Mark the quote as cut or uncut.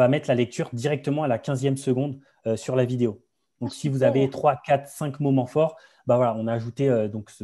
uncut